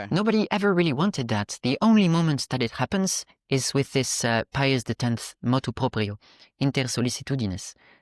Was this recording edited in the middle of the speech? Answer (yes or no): no